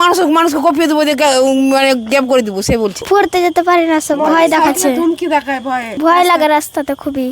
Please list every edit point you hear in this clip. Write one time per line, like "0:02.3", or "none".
0:03.0
0:05.9